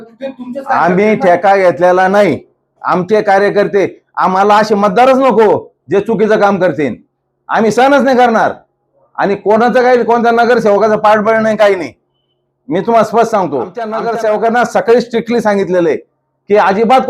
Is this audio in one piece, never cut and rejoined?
no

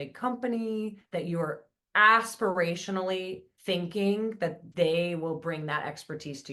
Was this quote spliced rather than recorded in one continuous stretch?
yes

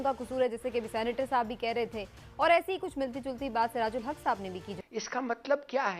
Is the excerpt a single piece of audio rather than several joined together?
no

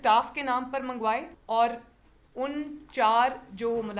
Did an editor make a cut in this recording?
yes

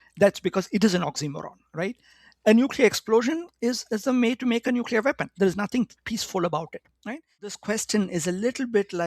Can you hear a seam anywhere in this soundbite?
yes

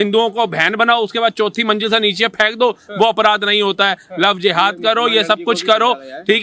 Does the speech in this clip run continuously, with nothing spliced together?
yes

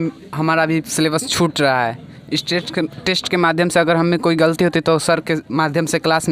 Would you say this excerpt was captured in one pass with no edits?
yes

